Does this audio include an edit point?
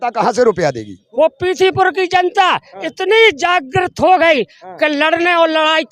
yes; 1 cut; at 0.9 s

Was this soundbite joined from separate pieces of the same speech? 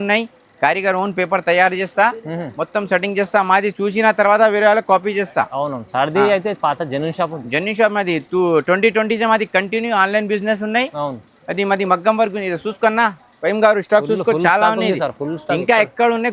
no; 0 cuts

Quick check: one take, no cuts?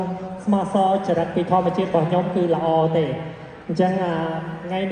yes; 0 cuts

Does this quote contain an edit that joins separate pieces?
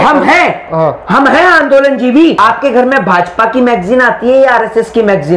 yes; 1 cut; at 2.4 s

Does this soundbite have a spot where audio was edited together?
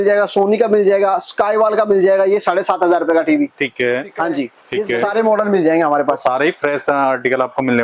yes; 1 cut; at 4.6 s

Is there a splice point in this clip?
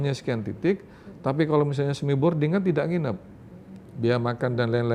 no; 0 cuts

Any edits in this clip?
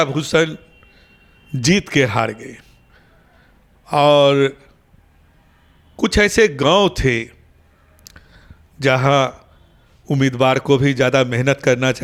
no; 0 cuts

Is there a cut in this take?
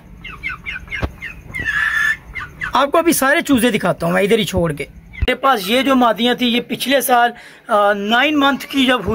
yes; 1 cut; at 5.3 s

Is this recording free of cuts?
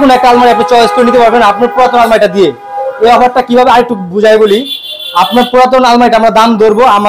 yes; 0 cuts

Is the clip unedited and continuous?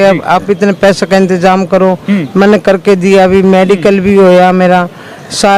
yes; 0 cuts

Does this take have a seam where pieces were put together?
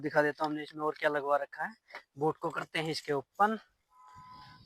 no; 0 cuts

